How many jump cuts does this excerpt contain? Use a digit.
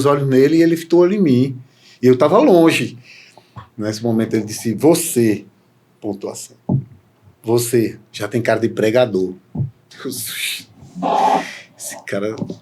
1